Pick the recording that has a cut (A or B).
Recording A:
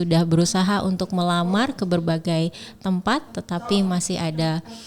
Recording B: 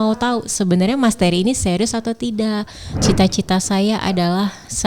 B